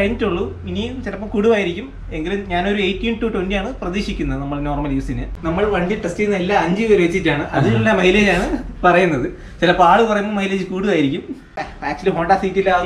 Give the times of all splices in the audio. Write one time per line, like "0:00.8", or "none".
0:05.3
0:11.6

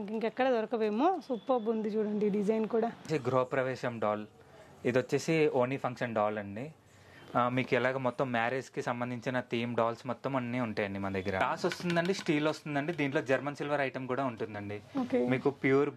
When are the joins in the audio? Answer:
0:03.0
0:11.4

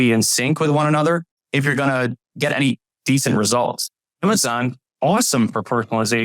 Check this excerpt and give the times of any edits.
0:02.3
0:04.1

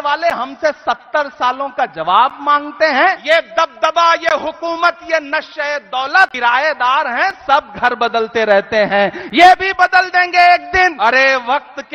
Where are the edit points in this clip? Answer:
0:03.2
0:06.3
0:10.9

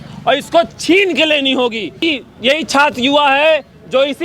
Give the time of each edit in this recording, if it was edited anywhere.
0:02.0

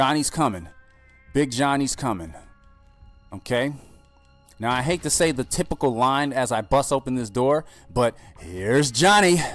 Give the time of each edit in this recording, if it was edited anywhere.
none

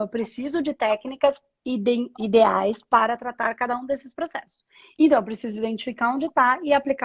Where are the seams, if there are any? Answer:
none

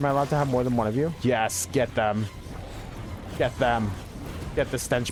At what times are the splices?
none

